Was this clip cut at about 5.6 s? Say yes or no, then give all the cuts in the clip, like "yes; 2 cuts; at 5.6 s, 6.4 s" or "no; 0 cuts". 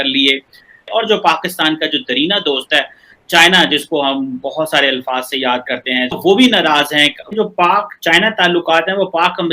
no; 1 cut; at 7.3 s